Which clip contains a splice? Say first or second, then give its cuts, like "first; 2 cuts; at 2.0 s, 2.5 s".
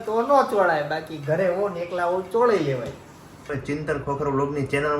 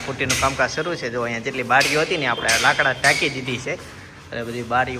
first; 1 cut; at 3.5 s